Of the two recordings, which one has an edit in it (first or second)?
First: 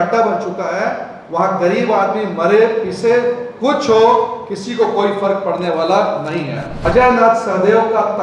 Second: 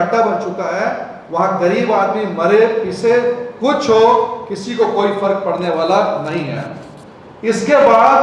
first